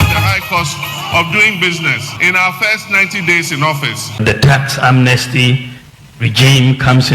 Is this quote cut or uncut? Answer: cut